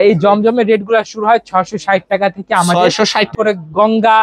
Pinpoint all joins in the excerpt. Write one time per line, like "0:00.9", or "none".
0:03.3